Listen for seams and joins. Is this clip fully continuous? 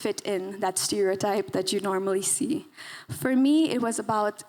yes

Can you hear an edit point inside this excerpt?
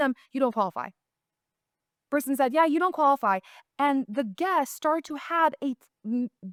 no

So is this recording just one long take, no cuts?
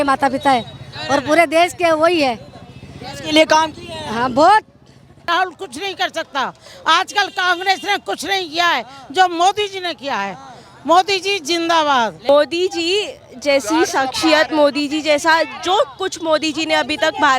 no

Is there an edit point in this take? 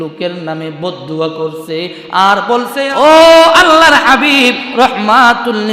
yes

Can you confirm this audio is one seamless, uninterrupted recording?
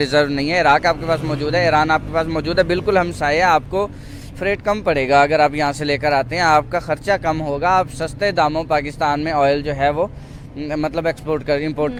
yes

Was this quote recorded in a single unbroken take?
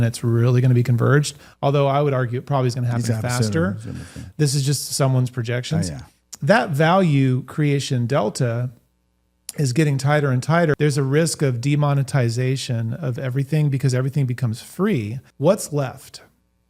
no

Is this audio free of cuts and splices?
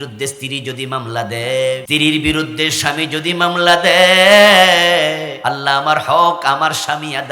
no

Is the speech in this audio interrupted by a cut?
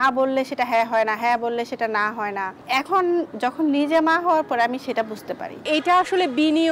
yes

